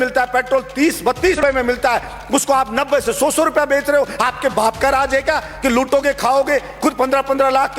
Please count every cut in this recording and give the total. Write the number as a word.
one